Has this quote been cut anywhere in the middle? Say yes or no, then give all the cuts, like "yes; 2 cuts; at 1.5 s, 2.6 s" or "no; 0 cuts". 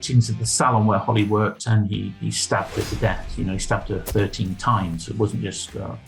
no; 0 cuts